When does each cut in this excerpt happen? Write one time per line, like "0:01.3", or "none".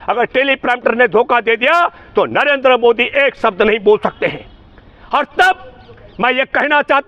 none